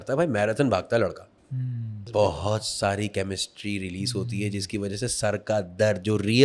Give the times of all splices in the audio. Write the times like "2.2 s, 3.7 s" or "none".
2.0 s